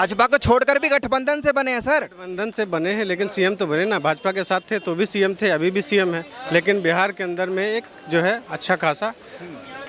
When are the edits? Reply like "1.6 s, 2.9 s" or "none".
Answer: none